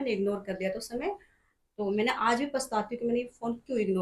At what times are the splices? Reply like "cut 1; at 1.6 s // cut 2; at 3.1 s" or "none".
none